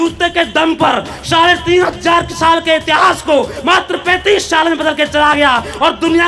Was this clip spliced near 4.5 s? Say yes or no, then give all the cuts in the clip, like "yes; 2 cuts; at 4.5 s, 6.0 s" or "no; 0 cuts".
no; 0 cuts